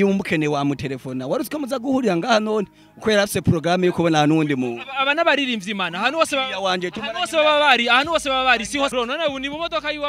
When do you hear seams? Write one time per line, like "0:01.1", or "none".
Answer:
0:08.9